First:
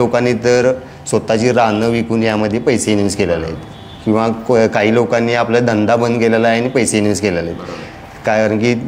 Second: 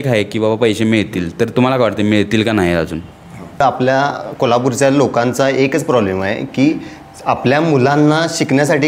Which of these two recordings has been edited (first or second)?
second